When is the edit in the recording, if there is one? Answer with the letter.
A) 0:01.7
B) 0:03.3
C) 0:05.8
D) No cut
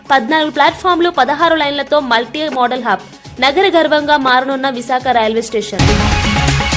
C